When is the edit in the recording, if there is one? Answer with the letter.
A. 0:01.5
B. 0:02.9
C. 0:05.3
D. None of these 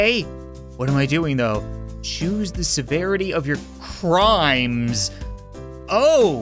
D